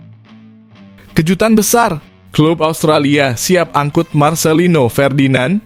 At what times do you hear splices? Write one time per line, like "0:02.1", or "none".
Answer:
none

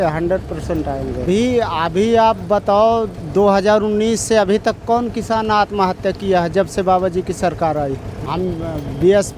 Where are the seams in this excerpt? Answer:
0:01.2
0:08.2

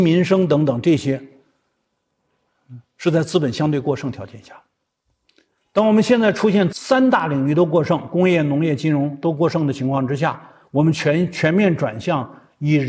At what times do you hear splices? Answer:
0:06.7

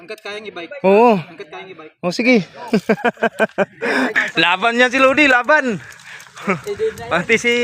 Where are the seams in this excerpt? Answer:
0:04.1

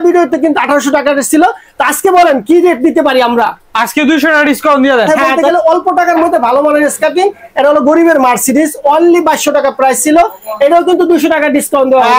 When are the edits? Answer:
0:05.1

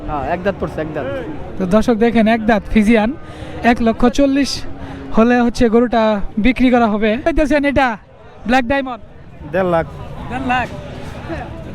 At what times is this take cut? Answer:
0:07.2

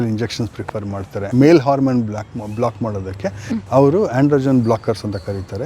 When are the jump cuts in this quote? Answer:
0:01.2

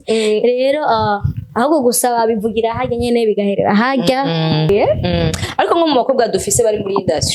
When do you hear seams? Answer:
0:04.7

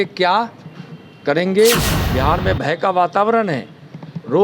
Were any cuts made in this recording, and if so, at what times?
0:02.0

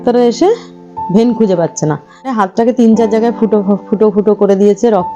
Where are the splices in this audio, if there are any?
0:02.3

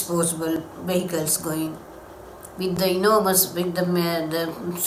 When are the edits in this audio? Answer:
none

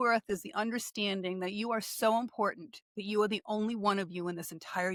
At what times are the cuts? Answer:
none

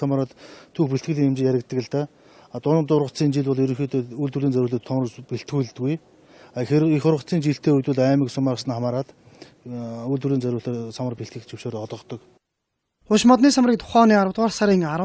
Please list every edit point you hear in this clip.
none

